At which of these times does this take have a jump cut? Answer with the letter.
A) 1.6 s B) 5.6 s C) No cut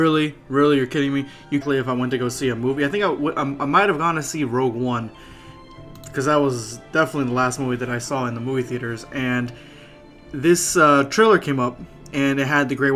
C